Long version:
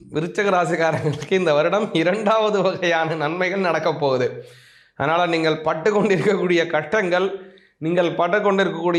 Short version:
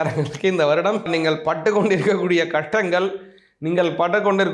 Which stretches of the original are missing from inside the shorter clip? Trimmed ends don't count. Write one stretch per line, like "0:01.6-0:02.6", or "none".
0:01.9-0:05.3

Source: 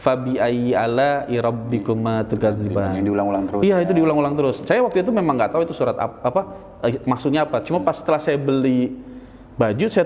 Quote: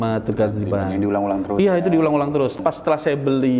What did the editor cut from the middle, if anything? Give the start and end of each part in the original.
0:04.6-0:07.8

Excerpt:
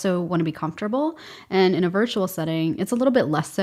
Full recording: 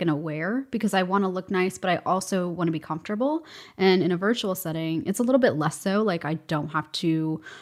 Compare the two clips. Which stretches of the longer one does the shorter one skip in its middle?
none

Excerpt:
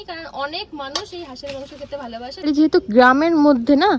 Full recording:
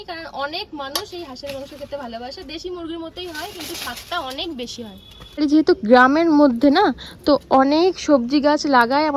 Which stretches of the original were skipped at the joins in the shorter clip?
0:02.4-0:05.3

